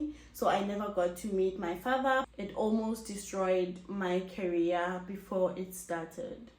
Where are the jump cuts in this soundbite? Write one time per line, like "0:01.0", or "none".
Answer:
0:02.3